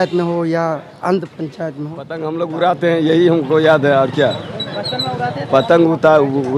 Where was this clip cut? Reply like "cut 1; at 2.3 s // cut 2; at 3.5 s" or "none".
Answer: cut 1; at 2.2 s